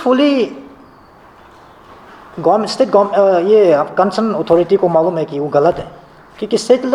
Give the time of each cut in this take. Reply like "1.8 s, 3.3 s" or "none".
none